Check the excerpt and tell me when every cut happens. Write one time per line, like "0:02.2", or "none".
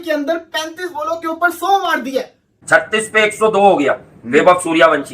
0:02.6